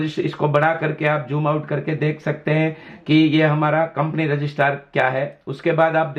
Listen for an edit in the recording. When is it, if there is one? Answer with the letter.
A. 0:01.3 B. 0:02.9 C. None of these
C